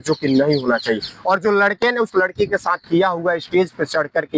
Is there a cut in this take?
no; 0 cuts

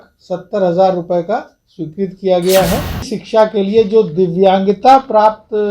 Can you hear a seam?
yes; 1 cut; at 3.2 s

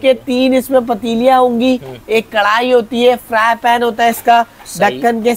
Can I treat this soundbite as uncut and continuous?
yes; 0 cuts

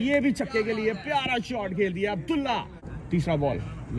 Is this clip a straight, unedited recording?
no; 1 cut; at 2.9 s

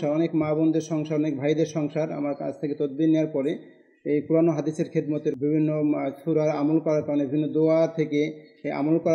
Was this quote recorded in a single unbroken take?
yes; 0 cuts

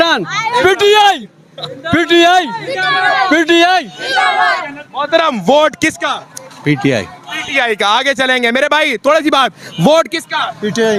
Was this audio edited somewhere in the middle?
no; 0 cuts

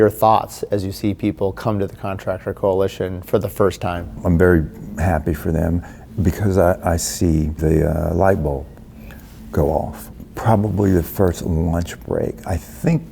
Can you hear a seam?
yes; 3 cuts; at 4.2 s, 7.6 s, 10.0 s

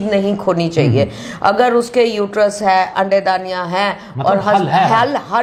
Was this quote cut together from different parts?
no; 0 cuts

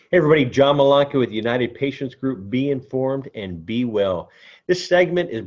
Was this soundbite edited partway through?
no; 0 cuts

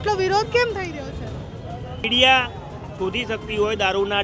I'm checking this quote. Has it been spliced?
yes; 1 cut; at 2.1 s

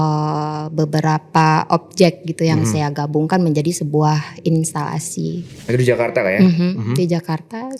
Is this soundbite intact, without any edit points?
no; 1 cut; at 5.5 s

